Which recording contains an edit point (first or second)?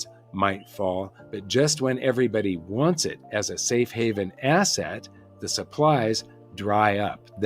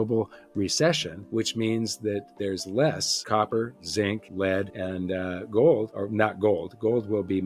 second